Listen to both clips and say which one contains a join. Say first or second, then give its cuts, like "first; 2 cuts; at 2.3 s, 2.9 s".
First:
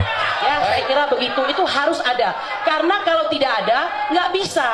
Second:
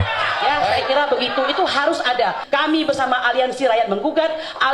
second; 1 cut; at 2.4 s